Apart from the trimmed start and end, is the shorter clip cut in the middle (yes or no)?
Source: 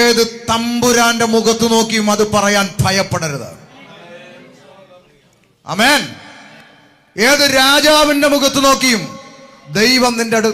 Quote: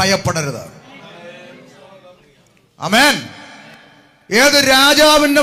no